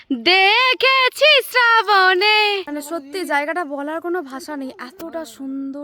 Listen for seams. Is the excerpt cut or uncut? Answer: cut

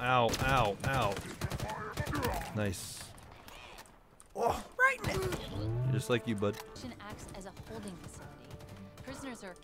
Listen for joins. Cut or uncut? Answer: cut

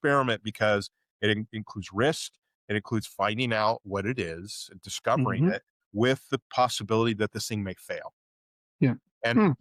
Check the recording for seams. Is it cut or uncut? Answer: uncut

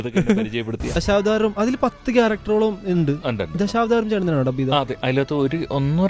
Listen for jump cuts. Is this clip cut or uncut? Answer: cut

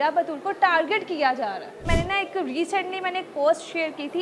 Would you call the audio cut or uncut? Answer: cut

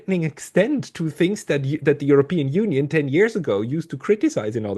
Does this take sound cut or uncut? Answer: uncut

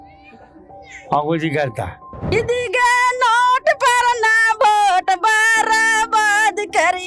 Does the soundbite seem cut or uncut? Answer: cut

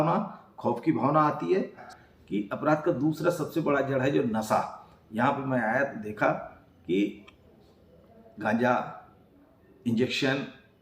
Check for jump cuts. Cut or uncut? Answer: cut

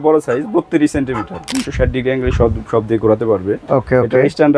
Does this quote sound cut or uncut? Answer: cut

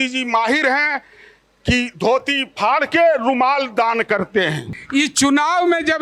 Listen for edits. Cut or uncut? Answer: cut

